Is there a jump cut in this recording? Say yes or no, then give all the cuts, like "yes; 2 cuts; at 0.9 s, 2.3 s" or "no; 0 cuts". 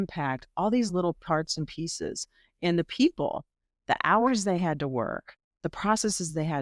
no; 0 cuts